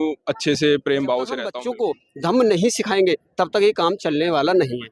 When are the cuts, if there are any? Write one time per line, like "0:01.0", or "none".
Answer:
0:01.6